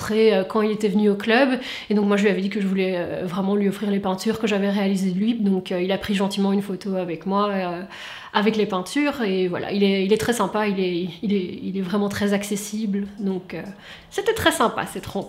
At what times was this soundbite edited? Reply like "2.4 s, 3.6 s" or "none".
none